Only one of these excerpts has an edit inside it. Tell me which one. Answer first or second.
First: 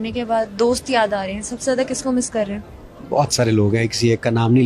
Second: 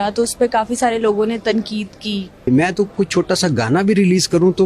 second